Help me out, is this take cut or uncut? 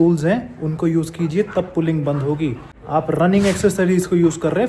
cut